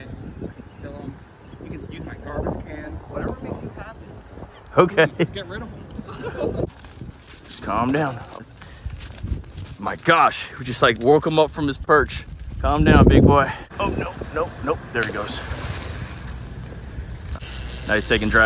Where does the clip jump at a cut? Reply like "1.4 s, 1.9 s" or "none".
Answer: 6.6 s, 13.6 s